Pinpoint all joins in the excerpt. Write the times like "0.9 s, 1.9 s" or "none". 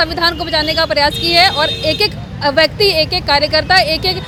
none